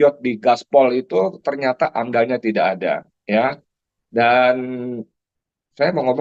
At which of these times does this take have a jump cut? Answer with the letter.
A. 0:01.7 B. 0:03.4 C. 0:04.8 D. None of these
D